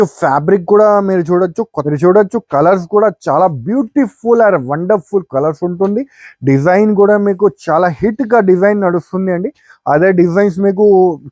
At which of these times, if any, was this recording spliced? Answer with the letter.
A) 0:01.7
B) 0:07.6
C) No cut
A